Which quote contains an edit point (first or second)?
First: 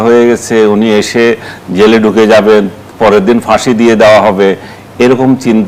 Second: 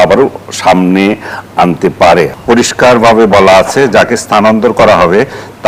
second